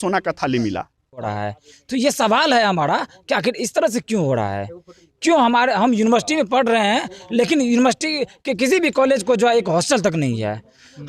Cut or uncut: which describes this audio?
cut